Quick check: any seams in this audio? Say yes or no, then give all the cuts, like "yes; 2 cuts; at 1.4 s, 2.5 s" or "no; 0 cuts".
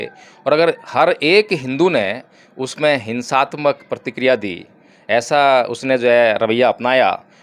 no; 0 cuts